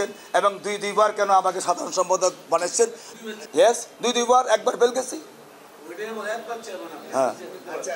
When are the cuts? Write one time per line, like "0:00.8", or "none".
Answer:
0:03.0